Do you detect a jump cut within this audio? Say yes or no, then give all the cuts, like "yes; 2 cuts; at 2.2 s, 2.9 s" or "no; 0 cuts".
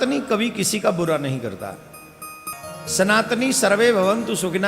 yes; 1 cut; at 2.5 s